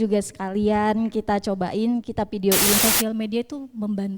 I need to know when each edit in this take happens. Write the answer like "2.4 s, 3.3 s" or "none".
2.8 s